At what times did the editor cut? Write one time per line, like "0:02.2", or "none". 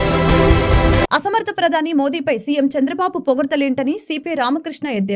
0:01.1